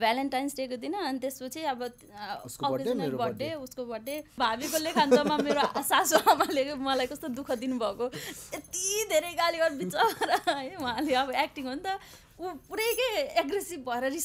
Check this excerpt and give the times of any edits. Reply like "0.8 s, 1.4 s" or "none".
4.3 s